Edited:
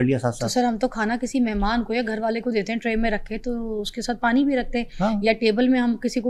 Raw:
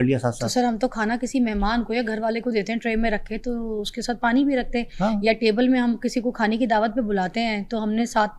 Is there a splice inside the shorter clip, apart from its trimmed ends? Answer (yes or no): no